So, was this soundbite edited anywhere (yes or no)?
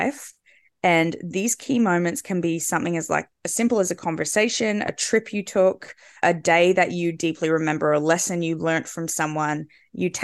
no